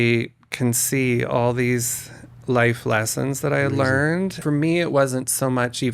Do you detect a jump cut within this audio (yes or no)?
yes